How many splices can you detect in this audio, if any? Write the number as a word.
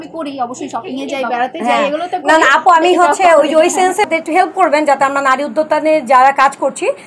one